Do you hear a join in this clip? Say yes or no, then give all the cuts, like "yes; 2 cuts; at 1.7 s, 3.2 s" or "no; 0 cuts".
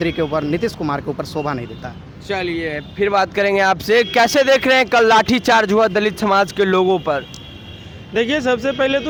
no; 0 cuts